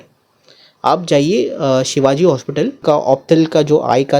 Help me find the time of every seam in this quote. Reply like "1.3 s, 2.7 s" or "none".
2.8 s